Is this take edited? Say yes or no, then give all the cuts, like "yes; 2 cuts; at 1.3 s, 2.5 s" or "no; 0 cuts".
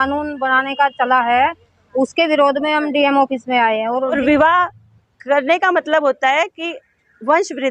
yes; 1 cut; at 4.2 s